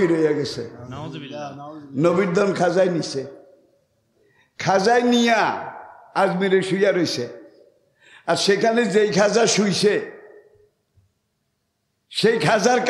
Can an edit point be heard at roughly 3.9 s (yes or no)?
no